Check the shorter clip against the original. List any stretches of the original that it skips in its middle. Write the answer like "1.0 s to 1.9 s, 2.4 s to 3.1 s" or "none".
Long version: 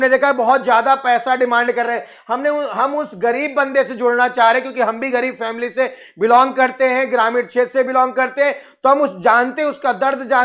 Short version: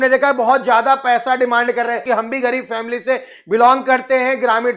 2.0 s to 4.7 s